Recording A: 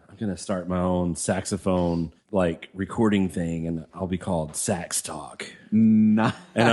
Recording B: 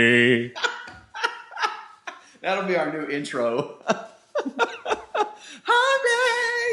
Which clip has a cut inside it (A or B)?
A